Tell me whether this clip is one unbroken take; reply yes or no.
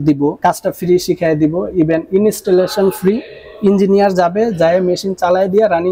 yes